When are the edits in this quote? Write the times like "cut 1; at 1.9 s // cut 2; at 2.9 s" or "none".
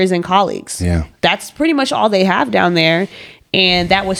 none